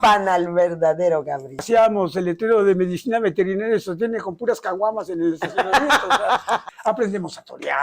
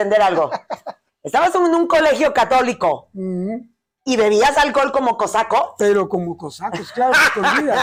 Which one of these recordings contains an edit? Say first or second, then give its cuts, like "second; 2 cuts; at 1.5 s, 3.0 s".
first; 2 cuts; at 1.6 s, 6.6 s